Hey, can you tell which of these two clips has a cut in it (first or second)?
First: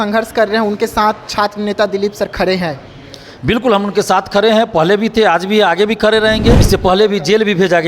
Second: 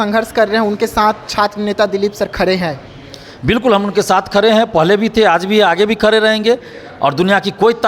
first